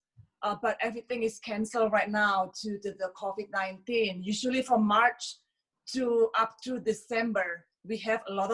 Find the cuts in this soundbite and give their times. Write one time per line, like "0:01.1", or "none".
none